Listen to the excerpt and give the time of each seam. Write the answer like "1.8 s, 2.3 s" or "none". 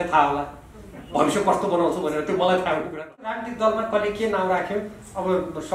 3.5 s